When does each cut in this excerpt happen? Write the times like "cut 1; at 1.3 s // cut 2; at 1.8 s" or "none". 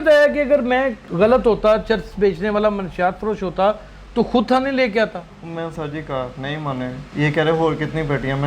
cut 1; at 1.0 s // cut 2; at 7.0 s